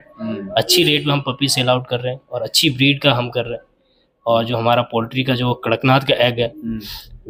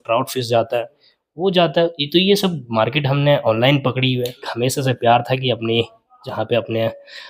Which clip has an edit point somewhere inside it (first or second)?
second